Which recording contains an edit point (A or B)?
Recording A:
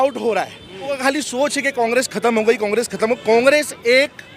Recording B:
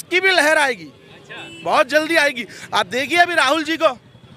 A